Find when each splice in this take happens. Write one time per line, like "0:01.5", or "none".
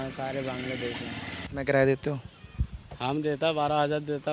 0:01.4